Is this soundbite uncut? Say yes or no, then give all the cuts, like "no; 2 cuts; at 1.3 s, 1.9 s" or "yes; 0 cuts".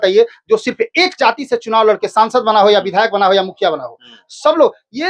yes; 0 cuts